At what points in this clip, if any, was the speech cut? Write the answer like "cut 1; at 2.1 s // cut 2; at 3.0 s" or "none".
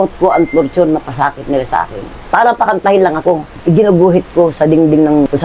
cut 1; at 2.2 s // cut 2; at 3.5 s

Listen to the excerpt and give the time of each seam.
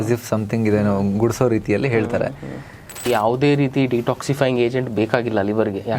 cut 1; at 3.1 s

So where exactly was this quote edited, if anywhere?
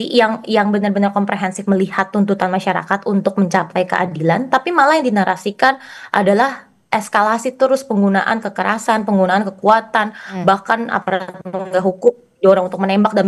none

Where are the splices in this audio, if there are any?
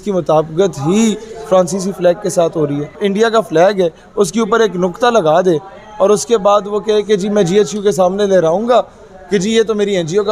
cut 1; at 3.0 s

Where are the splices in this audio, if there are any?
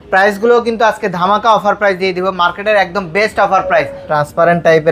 cut 1; at 4.0 s

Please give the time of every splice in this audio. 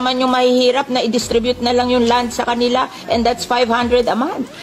none

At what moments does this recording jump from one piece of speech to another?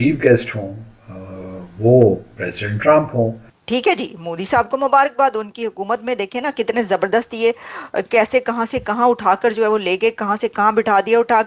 cut 1; at 3.5 s

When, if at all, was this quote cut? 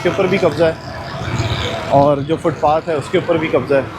none

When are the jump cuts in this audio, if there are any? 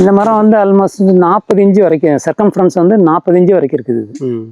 none

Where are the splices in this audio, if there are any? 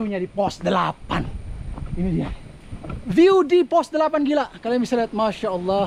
none

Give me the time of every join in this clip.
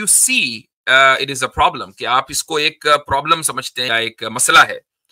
cut 1; at 3.9 s

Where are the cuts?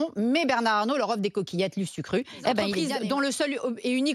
cut 1; at 2.8 s

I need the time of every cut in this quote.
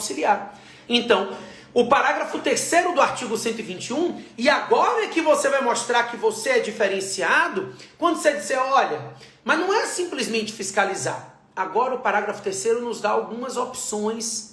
none

